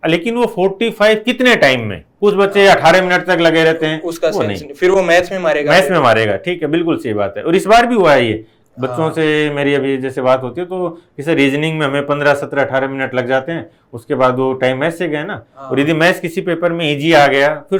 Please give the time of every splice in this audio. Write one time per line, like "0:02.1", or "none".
none